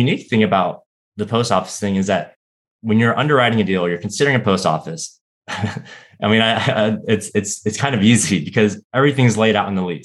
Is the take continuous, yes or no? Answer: yes